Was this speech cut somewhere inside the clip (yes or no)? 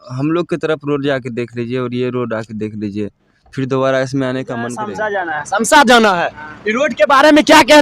yes